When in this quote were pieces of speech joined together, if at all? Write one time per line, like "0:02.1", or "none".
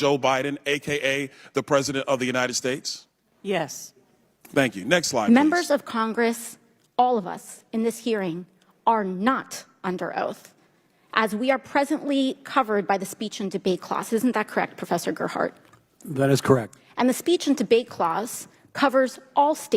0:05.2

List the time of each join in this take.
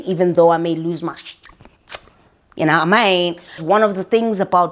0:03.6

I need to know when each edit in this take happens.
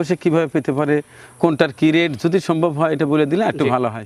none

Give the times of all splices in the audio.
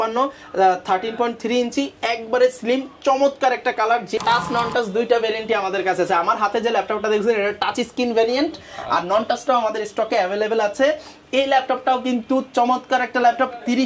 0:04.2

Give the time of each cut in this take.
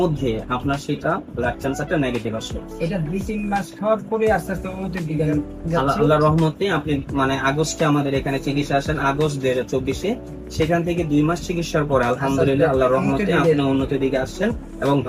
none

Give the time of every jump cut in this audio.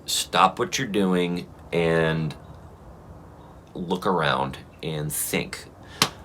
none

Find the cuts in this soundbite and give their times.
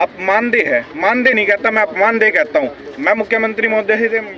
none

